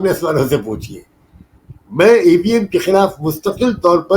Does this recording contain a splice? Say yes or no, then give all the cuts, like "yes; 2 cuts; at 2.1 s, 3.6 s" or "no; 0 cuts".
no; 0 cuts